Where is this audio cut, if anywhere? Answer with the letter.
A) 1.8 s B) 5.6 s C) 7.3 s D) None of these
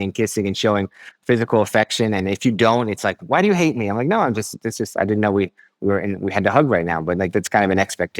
C